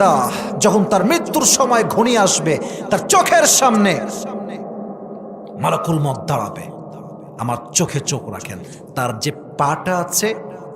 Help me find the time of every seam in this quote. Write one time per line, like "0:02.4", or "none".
none